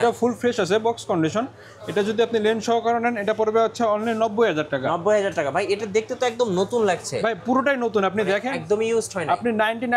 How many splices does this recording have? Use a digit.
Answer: 0